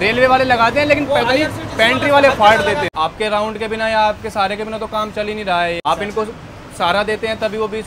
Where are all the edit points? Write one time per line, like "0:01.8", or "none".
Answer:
0:02.9
0:05.8

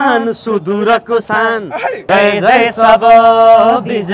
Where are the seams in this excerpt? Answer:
0:01.9

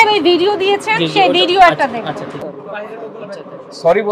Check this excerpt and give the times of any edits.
0:02.4

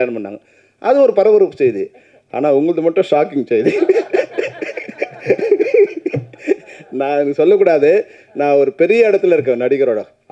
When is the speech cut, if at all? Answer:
none

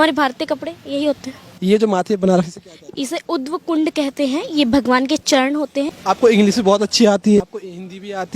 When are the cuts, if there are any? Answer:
0:01.5
0:05.9
0:07.4

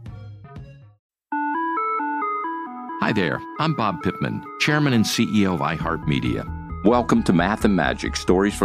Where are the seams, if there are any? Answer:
0:00.9

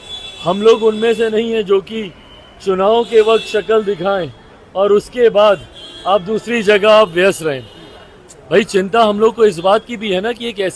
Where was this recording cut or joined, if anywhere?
none

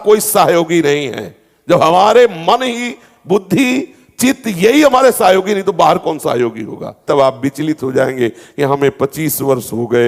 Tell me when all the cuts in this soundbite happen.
0:07.0

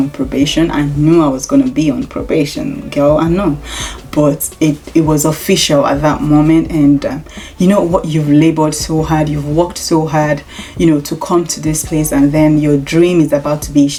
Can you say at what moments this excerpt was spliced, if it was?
none

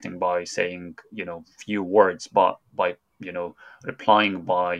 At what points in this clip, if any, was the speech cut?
0:02.7

